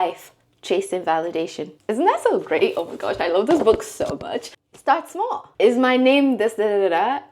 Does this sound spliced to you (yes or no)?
yes